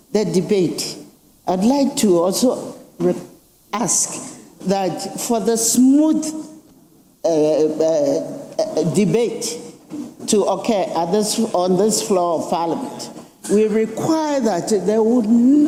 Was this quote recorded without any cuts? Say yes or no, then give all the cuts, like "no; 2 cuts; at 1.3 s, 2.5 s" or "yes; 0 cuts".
yes; 0 cuts